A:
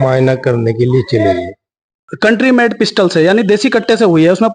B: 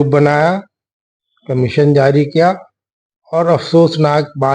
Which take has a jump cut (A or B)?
A